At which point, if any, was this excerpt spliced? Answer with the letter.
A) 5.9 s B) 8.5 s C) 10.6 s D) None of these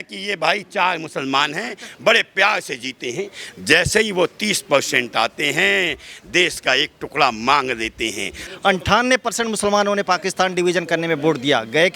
B